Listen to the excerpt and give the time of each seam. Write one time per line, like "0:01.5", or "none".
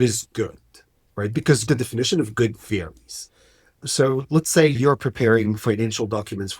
0:01.6
0:04.7